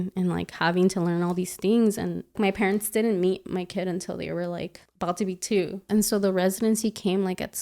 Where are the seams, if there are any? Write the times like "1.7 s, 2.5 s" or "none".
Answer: 2.4 s, 4.8 s, 5.8 s